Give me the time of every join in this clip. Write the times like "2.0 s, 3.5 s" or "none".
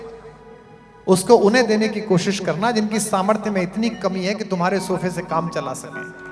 none